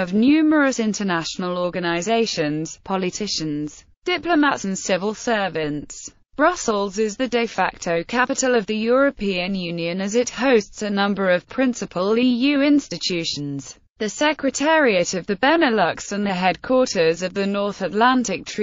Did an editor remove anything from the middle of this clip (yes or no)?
no